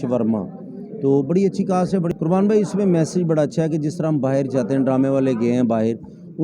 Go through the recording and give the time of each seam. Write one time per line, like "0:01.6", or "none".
0:02.1